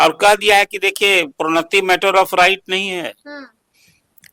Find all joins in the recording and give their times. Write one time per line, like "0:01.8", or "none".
none